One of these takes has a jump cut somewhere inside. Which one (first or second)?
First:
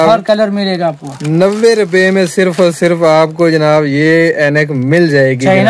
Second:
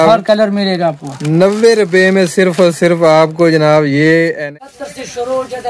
second